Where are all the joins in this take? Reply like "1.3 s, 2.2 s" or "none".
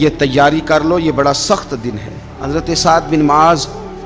2.3 s